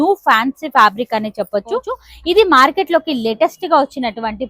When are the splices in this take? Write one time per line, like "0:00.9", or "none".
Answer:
0:02.0